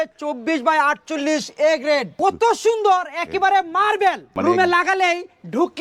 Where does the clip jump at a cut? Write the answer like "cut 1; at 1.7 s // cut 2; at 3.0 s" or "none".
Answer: cut 1; at 2.2 s // cut 2; at 4.3 s